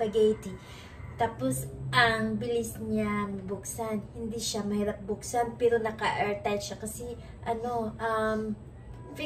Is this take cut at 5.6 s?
no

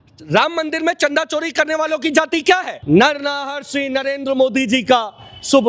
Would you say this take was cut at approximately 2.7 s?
yes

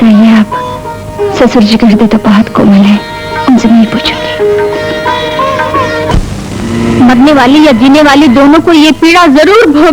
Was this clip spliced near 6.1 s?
yes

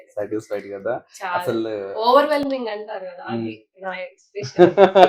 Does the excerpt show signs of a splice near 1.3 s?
no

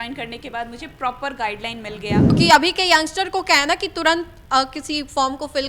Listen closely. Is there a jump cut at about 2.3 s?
yes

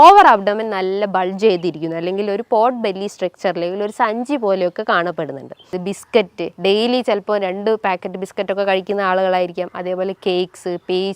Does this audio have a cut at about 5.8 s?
yes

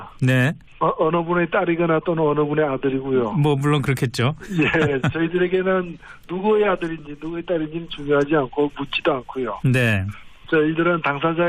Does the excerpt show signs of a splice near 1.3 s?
yes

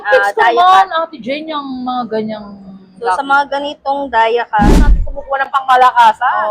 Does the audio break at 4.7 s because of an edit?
yes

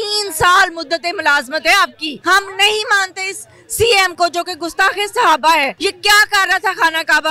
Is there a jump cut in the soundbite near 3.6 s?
no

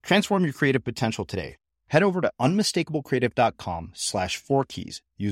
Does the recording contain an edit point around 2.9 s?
no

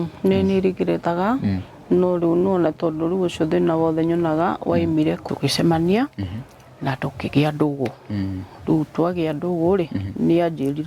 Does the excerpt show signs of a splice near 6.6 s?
no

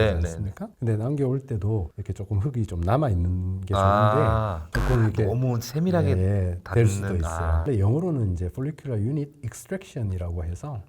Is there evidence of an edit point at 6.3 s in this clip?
no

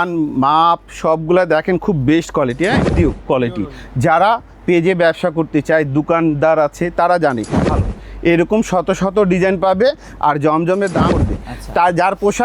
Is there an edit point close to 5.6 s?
no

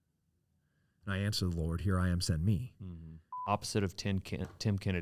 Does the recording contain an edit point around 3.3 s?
yes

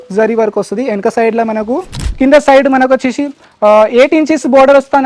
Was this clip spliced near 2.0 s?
yes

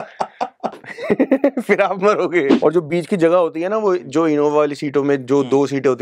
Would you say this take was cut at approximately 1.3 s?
no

